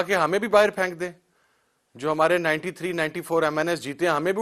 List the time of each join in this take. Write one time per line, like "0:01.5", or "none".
none